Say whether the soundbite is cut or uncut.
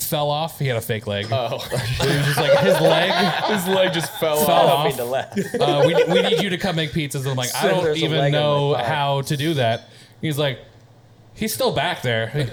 uncut